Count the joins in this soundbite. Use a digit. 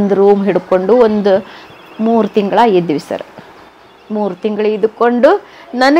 0